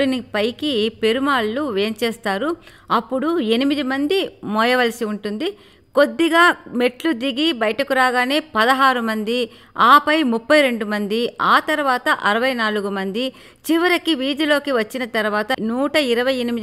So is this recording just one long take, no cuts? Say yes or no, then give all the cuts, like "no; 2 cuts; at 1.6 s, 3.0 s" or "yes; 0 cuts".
yes; 0 cuts